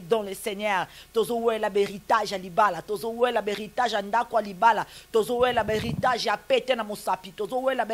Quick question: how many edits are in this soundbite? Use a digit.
0